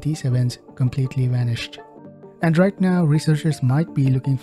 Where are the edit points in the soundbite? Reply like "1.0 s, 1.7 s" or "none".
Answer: 2.1 s